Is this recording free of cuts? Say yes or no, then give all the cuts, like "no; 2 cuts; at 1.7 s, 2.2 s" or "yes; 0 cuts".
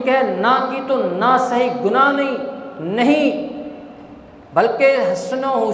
yes; 0 cuts